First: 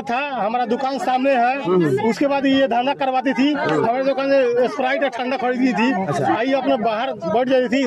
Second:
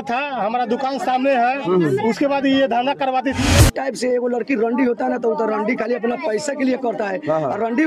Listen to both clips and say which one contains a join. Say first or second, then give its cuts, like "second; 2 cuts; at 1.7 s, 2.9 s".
second; 1 cut; at 3.5 s